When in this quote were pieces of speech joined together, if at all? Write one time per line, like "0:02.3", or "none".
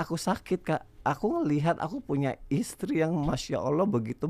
0:00.9